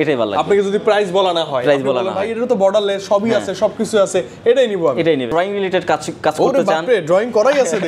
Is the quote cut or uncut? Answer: cut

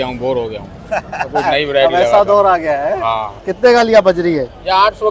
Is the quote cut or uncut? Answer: uncut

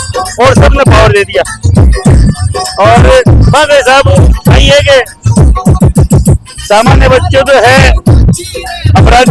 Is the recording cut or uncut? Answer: uncut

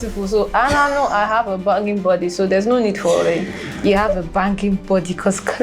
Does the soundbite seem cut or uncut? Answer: uncut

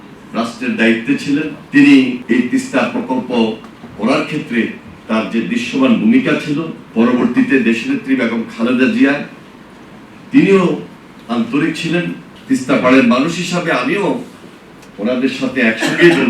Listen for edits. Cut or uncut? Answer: cut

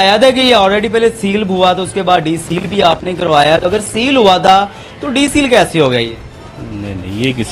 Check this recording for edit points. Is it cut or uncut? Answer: uncut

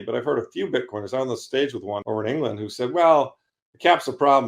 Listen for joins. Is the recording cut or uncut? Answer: cut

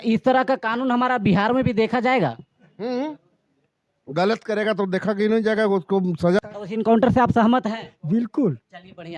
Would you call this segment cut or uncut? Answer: cut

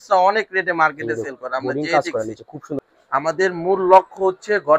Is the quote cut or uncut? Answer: cut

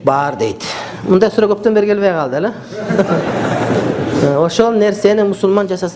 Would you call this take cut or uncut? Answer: uncut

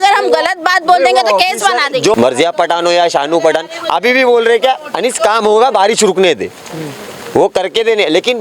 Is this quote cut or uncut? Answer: cut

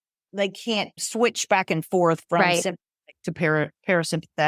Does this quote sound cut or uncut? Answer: cut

